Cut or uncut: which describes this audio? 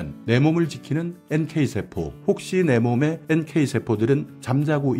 cut